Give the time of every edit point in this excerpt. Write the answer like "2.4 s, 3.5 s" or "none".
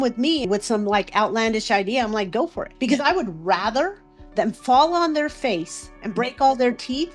2.6 s